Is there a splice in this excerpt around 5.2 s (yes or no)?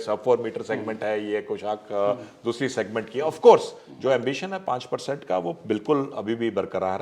no